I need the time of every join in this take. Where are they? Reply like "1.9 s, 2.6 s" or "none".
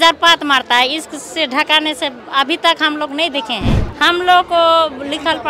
3.9 s